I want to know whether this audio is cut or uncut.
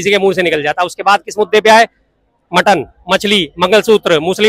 uncut